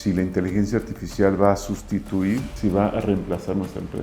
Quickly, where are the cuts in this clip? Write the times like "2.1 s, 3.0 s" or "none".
2.5 s